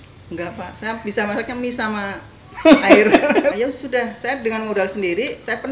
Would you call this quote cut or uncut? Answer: cut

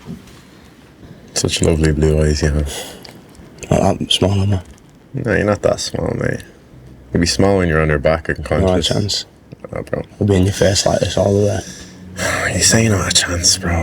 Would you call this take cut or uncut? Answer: cut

